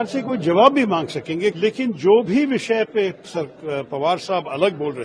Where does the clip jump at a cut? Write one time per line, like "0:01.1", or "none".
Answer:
0:01.6